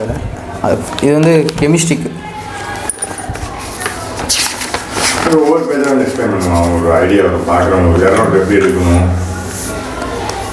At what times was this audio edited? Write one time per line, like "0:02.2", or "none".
none